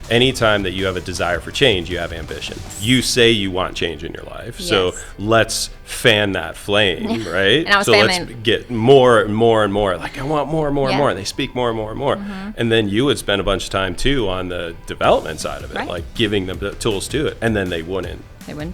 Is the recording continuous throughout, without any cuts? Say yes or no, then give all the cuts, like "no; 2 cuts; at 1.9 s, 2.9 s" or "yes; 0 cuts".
no; 1 cut; at 2.7 s